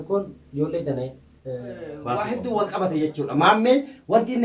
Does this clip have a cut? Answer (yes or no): yes